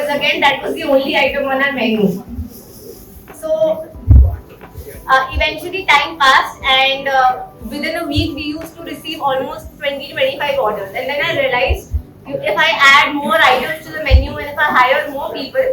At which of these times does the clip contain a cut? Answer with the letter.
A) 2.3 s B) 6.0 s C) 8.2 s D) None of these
D